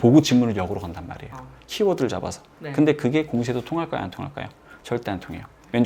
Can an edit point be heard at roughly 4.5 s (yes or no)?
no